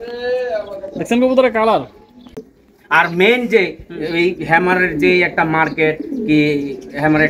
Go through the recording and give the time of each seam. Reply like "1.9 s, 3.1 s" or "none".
2.4 s